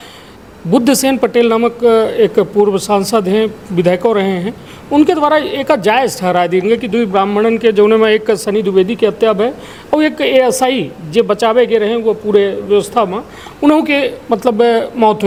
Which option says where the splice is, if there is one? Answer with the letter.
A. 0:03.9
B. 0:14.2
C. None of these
C